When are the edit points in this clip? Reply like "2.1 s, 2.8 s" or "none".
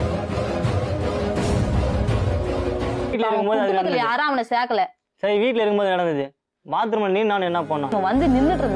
3.1 s